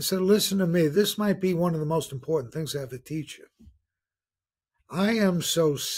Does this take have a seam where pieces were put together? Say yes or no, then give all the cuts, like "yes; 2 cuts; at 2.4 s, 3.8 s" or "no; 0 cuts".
yes; 1 cut; at 0.9 s